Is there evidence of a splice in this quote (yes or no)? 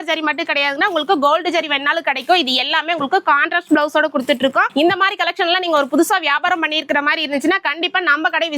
no